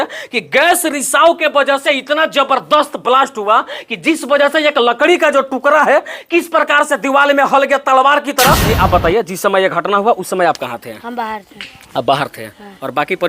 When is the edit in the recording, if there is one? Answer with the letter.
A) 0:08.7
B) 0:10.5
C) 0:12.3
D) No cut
A